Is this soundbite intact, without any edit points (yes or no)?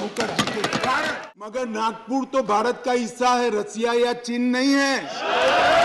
no